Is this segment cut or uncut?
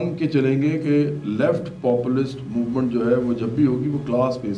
uncut